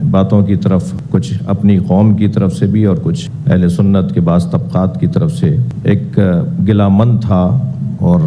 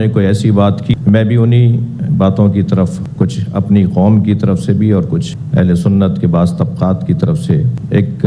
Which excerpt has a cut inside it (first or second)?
second